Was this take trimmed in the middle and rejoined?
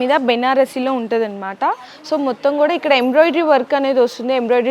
no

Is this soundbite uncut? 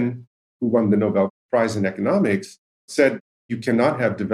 no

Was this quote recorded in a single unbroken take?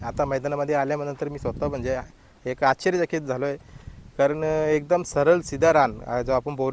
yes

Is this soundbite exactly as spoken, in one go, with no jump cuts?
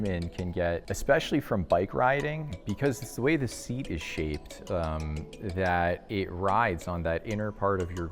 no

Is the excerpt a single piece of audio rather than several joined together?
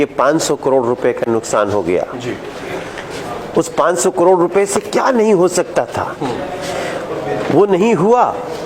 yes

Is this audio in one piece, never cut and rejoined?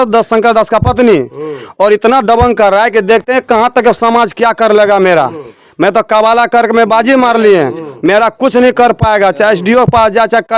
yes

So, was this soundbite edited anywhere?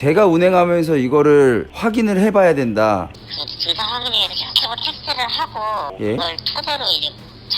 yes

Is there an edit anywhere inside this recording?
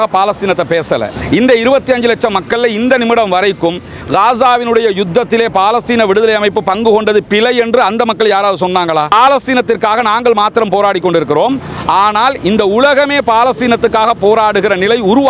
yes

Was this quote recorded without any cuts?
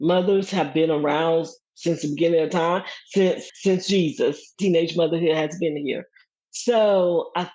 no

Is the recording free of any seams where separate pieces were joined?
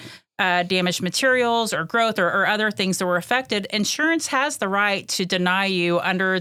yes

